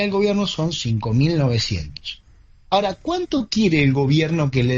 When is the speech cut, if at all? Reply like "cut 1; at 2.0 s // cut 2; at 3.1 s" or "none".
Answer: none

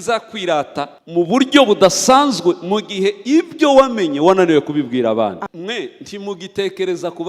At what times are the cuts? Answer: cut 1; at 1.0 s // cut 2; at 5.4 s

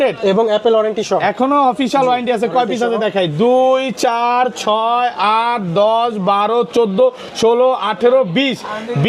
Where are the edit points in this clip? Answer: none

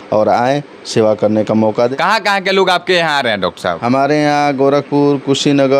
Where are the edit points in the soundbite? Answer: cut 1; at 1.9 s

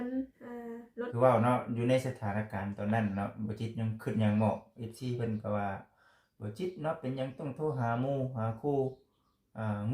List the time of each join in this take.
cut 1; at 1.1 s

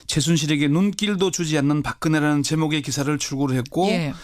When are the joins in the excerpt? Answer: cut 1; at 2.2 s

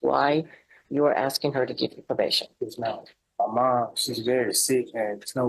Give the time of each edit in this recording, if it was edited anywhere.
cut 1; at 3.2 s

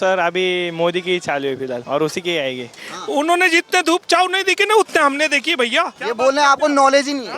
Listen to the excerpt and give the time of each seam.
cut 1; at 1.8 s // cut 2; at 2.9 s // cut 3; at 6.0 s

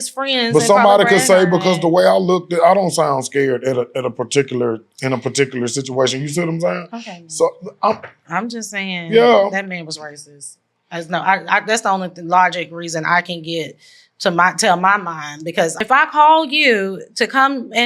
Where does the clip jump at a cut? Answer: cut 1; at 15.8 s

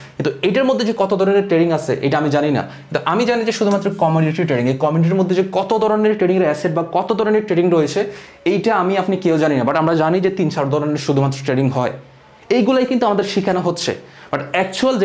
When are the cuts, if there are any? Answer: none

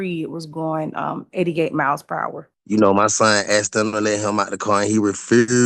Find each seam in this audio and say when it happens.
cut 1; at 2.5 s

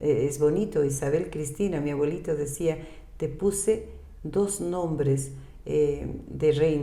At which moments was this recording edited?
none

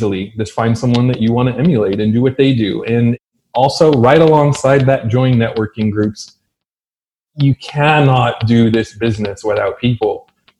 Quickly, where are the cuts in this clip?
cut 1; at 3.2 s // cut 2; at 7.0 s

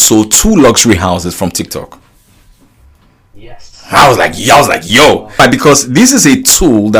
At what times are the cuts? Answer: cut 1; at 5.4 s

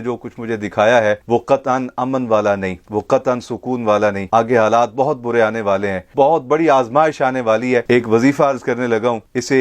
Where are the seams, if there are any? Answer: cut 1; at 6.0 s // cut 2; at 7.8 s

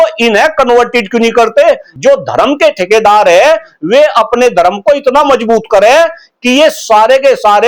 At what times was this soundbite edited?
cut 1; at 1.9 s

